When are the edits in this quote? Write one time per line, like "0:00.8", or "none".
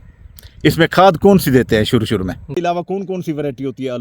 0:02.4